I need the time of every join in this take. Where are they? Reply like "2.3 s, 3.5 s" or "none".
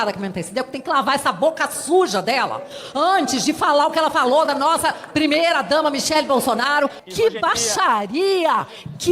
7.0 s